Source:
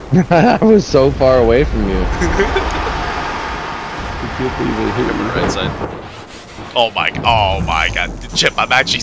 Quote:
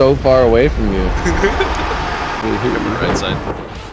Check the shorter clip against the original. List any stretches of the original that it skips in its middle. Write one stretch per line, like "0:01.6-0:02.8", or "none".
0:03.4-0:04.8